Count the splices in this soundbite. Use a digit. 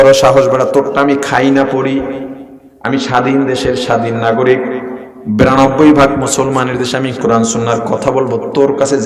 0